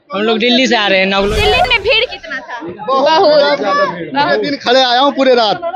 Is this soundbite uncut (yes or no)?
no